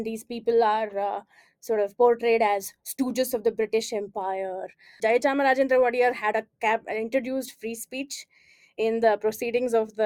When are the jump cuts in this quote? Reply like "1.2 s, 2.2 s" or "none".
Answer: 5.0 s